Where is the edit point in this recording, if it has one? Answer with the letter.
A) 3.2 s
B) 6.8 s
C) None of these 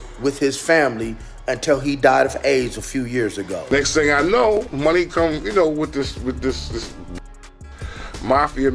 A